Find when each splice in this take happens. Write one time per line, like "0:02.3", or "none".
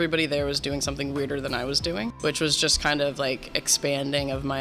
0:02.1

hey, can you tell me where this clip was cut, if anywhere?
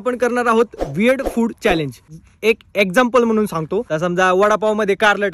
0:02.4
0:03.9

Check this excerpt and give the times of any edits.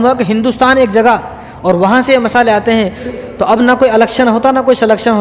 0:03.1

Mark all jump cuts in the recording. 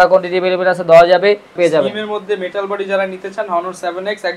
0:01.6

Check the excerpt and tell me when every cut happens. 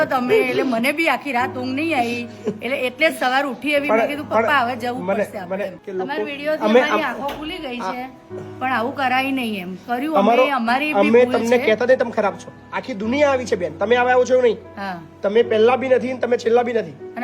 0:05.7

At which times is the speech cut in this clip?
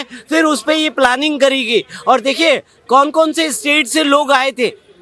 none

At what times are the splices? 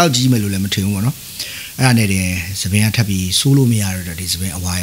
none

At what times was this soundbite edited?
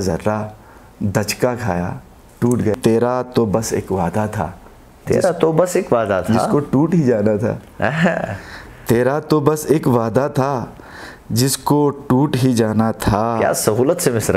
0:02.8

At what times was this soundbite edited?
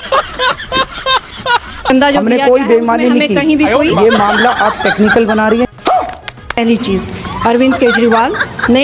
0:01.9

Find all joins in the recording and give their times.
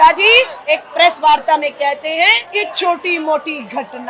none

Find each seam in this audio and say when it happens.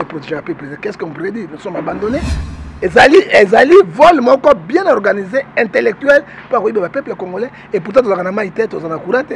0:02.4

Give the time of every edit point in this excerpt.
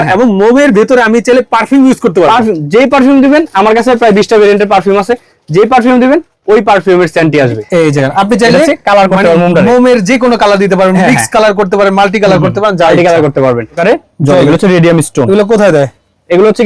0:07.6
0:13.8

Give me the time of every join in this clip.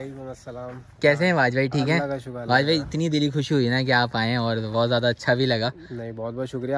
none

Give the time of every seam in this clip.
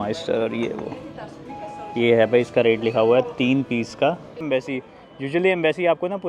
0:04.4

